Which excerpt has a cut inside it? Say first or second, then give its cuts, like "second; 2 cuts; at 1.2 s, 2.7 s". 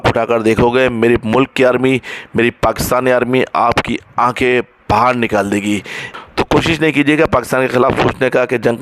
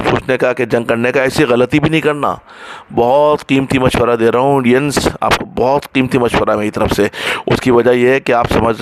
first; 1 cut; at 6.0 s